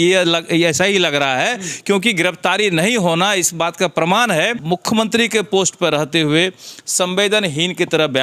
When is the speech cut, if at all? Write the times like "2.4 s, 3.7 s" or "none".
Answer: 4.6 s